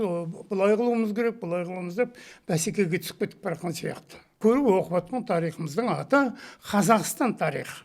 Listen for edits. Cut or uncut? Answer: cut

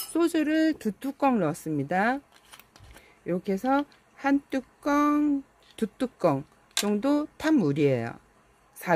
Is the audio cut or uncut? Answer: uncut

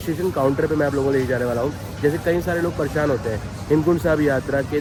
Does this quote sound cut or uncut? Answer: uncut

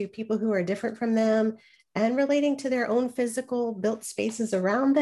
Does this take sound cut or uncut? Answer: uncut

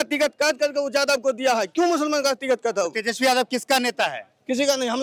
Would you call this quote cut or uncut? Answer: uncut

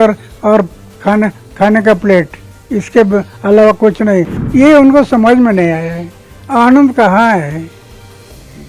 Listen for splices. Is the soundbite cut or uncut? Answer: cut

